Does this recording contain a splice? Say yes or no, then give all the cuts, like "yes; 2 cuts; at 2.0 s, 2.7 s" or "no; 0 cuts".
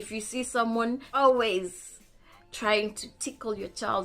yes; 1 cut; at 1.1 s